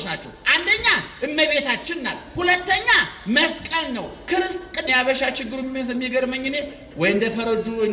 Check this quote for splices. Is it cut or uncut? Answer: cut